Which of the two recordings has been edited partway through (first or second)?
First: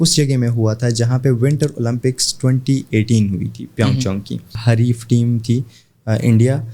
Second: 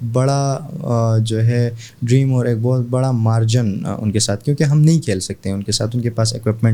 first